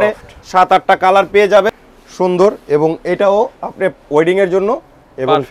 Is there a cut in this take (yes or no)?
yes